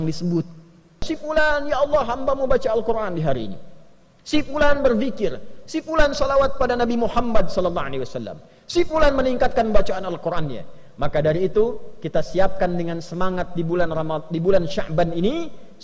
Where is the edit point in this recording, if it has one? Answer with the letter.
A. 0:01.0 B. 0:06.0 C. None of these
A